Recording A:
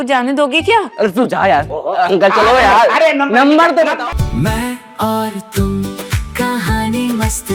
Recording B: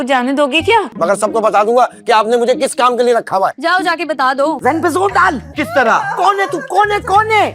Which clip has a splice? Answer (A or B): B